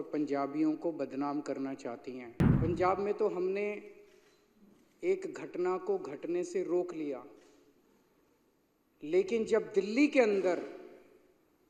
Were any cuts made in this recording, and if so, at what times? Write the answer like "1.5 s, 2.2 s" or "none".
2.4 s